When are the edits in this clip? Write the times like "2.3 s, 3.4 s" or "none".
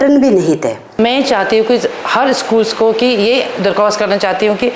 1.0 s